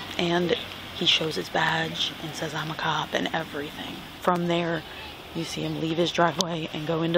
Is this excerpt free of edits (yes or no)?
no